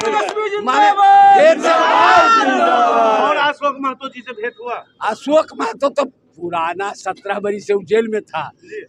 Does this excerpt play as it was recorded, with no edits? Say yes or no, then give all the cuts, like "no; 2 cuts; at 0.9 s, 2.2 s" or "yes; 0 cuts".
yes; 0 cuts